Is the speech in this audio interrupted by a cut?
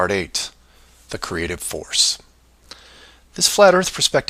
no; 0 cuts

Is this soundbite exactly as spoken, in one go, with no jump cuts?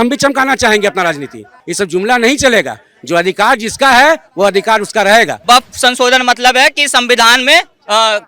no; 2 cuts; at 1.6 s, 5.4 s

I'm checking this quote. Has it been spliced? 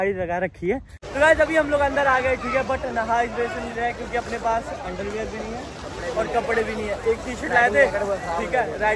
yes; 1 cut; at 1.0 s

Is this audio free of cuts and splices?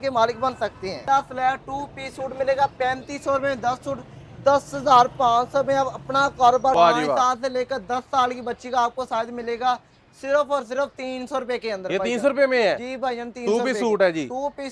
no; 2 cuts; at 1.0 s, 6.8 s

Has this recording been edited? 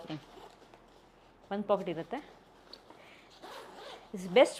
no; 0 cuts

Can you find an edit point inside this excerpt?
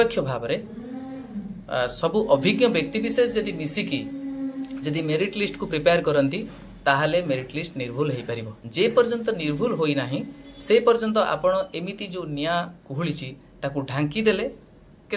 no; 0 cuts

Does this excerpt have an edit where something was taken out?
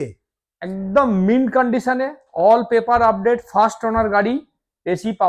no; 0 cuts

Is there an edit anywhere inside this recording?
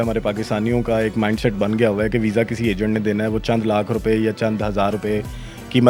no; 0 cuts

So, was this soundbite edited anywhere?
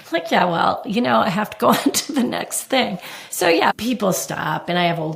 yes; 1 cut; at 3.7 s

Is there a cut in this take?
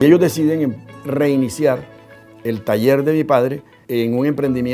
yes; 2 cuts; at 1.0 s, 3.7 s

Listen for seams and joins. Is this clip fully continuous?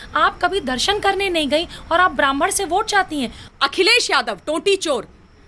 no; 1 cut; at 3.4 s

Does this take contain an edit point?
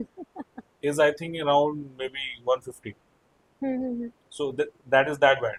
no; 0 cuts

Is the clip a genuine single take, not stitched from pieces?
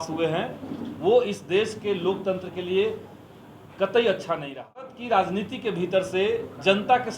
no; 1 cut; at 5.0 s

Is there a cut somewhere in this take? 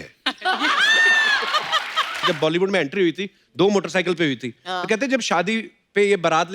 yes; 1 cut; at 2.2 s

